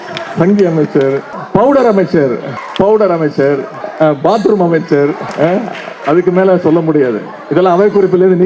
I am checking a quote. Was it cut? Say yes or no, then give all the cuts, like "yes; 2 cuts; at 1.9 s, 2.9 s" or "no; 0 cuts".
yes; 4 cuts; at 1.3 s, 2.6 s, 3.8 s, 5.3 s